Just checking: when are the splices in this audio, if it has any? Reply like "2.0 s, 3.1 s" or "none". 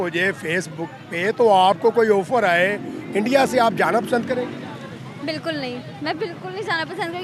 none